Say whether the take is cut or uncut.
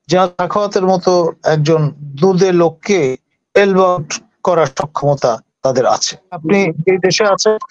cut